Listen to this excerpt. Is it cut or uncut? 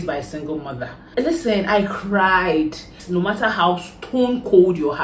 cut